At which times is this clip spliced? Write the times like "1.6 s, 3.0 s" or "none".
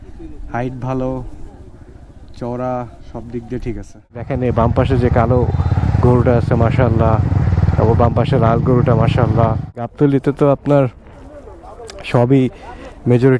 4.3 s, 9.9 s